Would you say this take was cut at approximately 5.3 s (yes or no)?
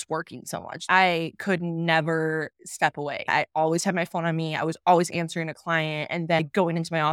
no